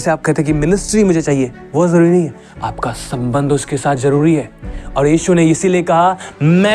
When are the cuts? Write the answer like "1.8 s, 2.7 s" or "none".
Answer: 1.6 s